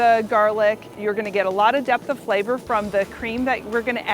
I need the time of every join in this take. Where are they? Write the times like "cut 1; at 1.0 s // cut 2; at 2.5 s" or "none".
cut 1; at 1.0 s